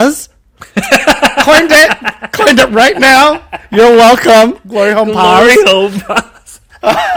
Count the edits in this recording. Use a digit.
0